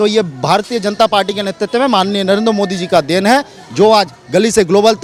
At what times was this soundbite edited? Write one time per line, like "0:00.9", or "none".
none